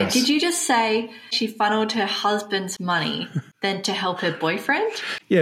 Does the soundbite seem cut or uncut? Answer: cut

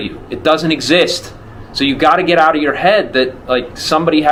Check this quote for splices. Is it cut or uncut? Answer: uncut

